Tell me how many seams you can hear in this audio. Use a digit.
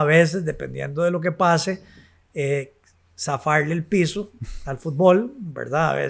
0